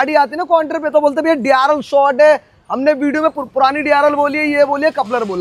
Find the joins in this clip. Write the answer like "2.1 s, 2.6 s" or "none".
none